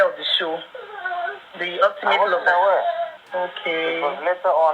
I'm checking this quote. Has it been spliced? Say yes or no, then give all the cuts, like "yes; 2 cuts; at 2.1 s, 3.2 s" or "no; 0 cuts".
yes; 1 cut; at 3.2 s